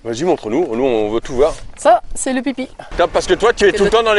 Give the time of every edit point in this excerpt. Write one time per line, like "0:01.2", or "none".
0:02.9